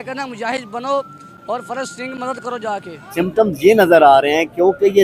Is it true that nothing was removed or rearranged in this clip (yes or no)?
no